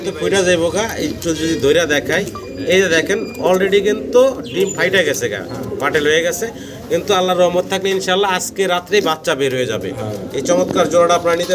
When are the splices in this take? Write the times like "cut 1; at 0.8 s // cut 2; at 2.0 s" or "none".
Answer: none